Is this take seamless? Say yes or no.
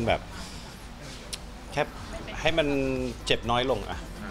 yes